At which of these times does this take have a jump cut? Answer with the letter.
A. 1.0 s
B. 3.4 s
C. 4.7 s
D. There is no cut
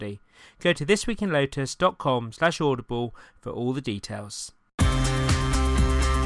C